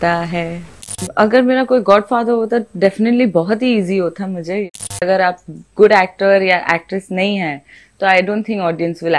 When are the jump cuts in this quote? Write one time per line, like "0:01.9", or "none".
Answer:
0:01.0
0:04.8